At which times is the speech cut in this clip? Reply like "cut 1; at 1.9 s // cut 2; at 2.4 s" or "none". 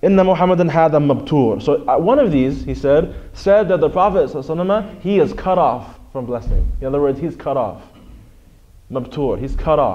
cut 1; at 5.1 s